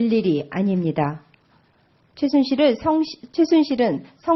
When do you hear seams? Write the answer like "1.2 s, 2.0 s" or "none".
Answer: none